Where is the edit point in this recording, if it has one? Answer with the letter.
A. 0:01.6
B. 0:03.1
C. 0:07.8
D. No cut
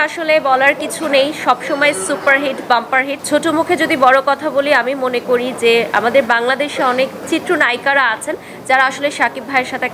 B